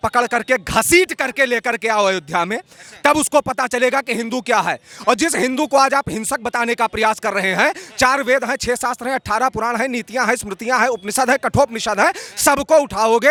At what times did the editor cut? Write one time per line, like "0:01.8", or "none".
none